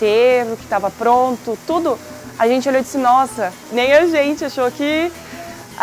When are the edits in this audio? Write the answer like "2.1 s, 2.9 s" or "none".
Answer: 3.6 s